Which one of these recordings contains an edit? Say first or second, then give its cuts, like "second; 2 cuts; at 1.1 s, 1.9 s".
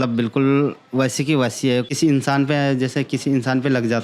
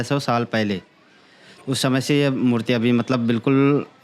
first; 1 cut; at 1.9 s